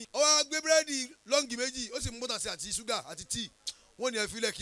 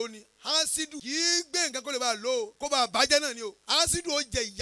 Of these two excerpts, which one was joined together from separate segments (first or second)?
second